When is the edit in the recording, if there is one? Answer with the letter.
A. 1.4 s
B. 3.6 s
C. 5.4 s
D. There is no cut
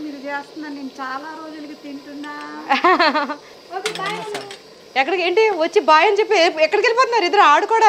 B